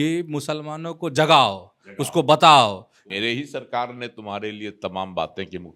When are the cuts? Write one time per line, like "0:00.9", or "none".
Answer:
0:03.0

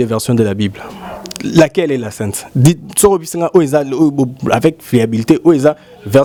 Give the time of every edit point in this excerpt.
none

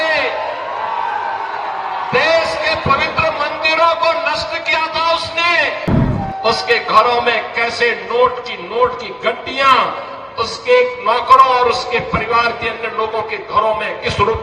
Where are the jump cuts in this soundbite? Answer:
0:05.9

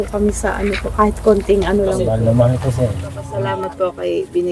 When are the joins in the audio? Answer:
0:02.1
0:03.3

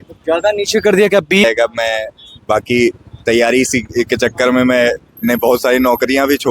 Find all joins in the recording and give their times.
0:01.4

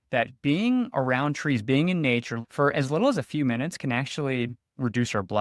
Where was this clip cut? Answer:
0:02.4

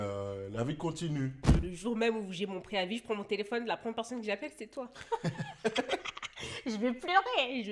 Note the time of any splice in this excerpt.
0:01.6

